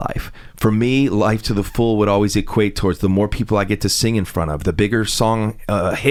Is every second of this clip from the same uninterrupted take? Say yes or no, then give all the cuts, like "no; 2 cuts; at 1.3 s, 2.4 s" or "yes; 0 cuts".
yes; 0 cuts